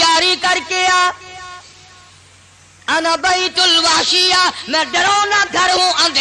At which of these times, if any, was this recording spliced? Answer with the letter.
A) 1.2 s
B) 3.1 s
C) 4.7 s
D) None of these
D